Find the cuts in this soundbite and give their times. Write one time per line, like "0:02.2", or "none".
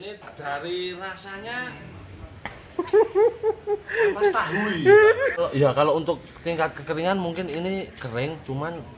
0:05.4